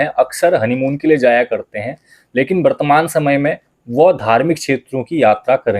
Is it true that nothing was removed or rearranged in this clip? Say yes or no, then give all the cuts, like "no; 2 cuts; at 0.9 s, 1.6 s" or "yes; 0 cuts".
yes; 0 cuts